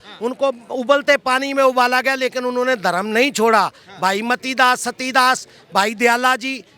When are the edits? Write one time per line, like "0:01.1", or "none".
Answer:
none